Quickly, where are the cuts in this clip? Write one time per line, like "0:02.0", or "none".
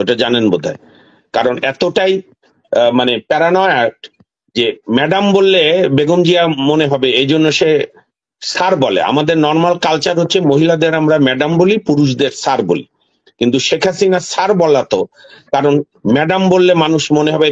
none